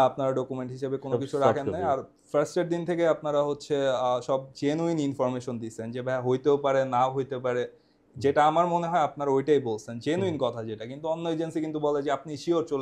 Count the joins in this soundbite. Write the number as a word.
zero